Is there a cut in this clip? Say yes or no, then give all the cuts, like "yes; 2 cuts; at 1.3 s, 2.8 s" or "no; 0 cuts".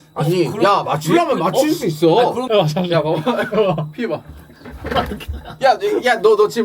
yes; 1 cut; at 2.4 s